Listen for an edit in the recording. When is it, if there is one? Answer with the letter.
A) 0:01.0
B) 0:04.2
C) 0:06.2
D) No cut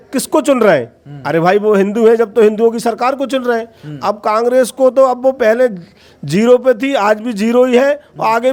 D